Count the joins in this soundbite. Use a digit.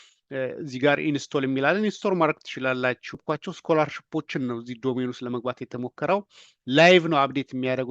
1